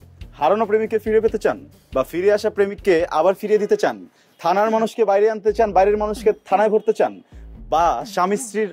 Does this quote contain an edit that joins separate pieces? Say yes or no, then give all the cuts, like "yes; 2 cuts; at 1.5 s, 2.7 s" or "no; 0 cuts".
no; 0 cuts